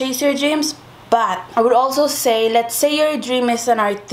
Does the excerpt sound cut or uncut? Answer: uncut